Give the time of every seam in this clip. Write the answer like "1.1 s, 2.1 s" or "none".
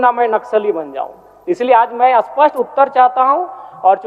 none